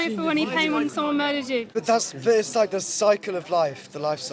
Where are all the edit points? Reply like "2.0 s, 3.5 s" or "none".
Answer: 1.7 s